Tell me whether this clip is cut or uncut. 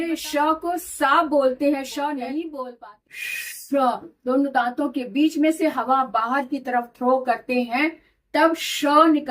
cut